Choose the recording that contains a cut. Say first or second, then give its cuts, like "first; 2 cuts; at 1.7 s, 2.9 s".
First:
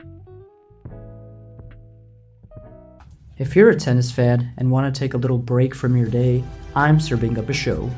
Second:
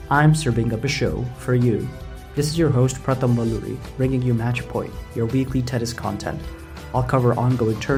first; 1 cut; at 3.0 s